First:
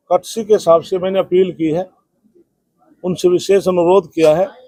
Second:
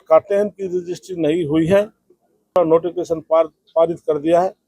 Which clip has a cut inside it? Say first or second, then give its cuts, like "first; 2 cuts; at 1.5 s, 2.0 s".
second; 1 cut; at 2.5 s